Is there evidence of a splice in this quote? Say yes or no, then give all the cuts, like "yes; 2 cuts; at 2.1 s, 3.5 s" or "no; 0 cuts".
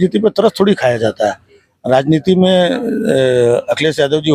no; 0 cuts